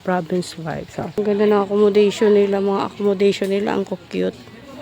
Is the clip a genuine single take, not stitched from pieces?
no; 1 cut; at 1.2 s

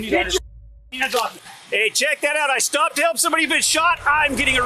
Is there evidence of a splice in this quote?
yes; 1 cut; at 1.4 s

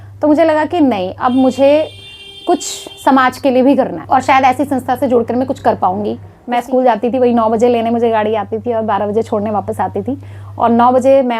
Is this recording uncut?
no; 1 cut; at 6.3 s

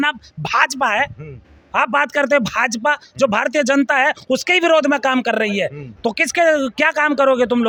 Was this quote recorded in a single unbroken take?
yes; 0 cuts

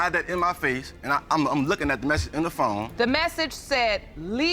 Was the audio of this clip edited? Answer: yes; 1 cut; at 2.9 s

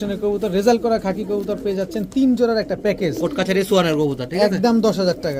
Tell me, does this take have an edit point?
no; 0 cuts

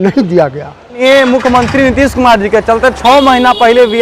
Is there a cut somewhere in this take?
yes; 1 cut; at 0.9 s

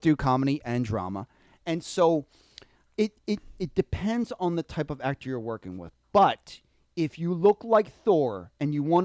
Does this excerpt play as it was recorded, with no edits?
yes; 0 cuts

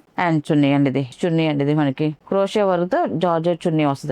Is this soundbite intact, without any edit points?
no; 1 cut; at 1.1 s

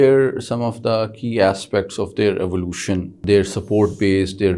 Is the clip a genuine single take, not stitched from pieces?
no; 1 cut; at 3.2 s

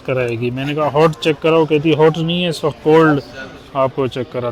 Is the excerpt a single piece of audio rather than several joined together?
yes; 0 cuts

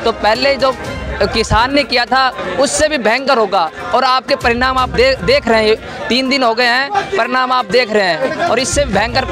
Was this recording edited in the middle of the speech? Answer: no; 0 cuts

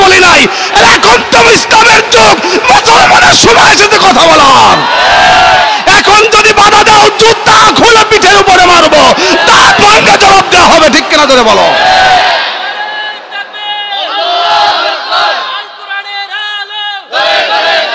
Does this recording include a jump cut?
no; 0 cuts

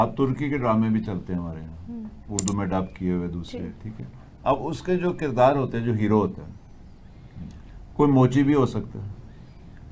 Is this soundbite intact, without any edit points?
yes; 0 cuts

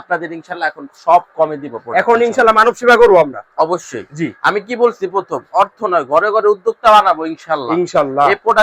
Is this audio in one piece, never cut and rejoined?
yes; 0 cuts

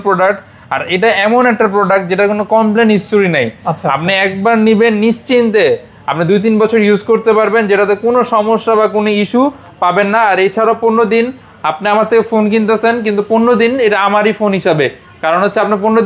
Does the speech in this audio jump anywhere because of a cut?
no; 0 cuts

